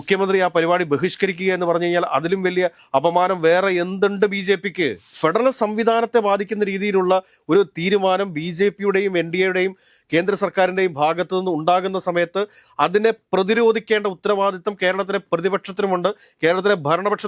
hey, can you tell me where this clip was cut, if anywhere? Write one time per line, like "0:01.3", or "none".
0:05.1